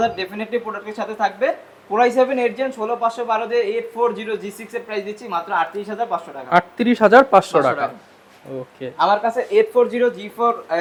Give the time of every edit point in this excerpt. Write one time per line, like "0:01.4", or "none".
none